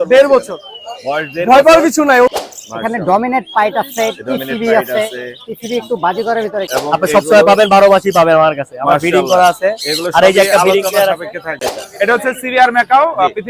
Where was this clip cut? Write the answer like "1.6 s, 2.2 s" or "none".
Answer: 2.3 s, 6.7 s, 11.8 s